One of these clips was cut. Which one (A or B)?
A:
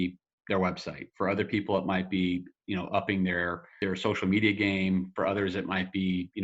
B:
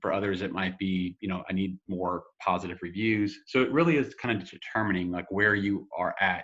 A